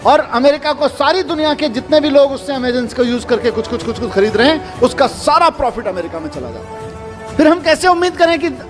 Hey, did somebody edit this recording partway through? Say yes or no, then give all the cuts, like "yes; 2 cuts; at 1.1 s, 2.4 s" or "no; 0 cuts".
yes; 1 cut; at 6.6 s